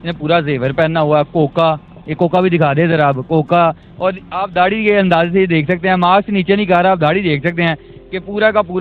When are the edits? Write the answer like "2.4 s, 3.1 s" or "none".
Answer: none